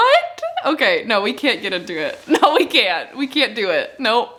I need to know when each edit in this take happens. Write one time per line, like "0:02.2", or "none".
none